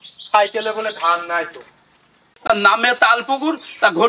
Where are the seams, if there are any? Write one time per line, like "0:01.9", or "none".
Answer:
0:02.3